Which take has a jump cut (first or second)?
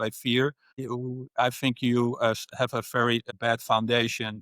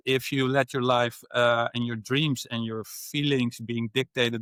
first